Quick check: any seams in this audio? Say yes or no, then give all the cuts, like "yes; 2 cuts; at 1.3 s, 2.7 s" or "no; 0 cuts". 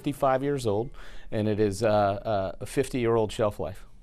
no; 0 cuts